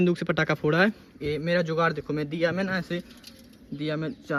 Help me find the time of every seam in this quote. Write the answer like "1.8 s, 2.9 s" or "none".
none